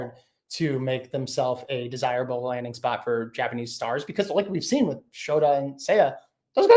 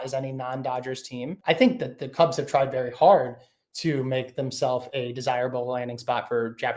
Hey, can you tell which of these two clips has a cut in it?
second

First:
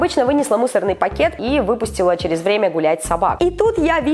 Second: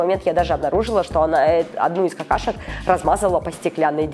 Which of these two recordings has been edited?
first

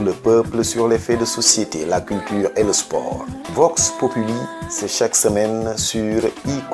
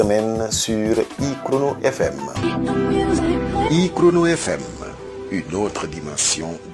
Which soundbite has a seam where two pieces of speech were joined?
second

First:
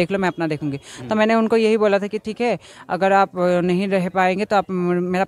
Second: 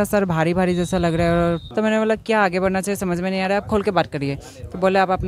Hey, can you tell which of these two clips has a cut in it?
second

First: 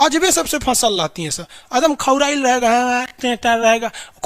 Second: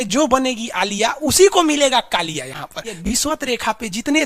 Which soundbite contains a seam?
second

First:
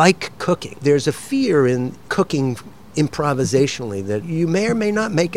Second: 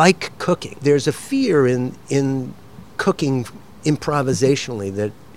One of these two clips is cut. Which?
first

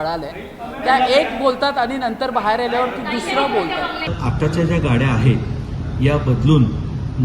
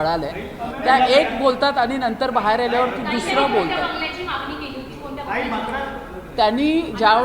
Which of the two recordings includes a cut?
first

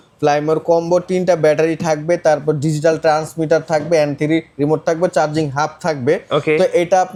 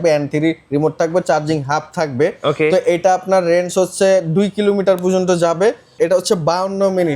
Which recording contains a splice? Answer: second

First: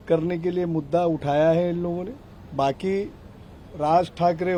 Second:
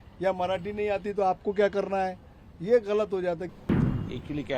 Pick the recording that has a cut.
second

